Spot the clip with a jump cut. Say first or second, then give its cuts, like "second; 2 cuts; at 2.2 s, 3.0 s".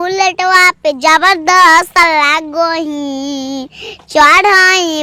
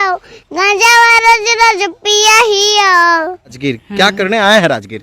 second; 1 cut; at 3.6 s